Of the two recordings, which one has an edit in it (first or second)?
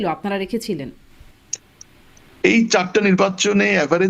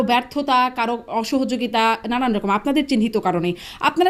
first